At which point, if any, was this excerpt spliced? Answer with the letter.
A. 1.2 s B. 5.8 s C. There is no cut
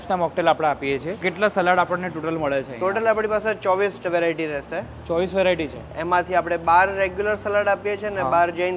A